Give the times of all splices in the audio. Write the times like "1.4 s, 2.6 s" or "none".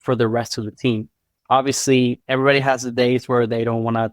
1.3 s, 2.2 s